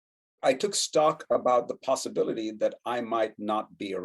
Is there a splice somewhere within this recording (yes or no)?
no